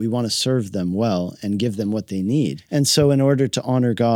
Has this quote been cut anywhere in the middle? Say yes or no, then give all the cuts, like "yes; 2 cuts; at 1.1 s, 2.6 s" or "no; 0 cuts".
yes; 1 cut; at 2.6 s